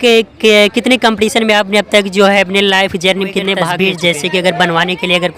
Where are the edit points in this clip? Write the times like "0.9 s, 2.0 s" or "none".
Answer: 3.7 s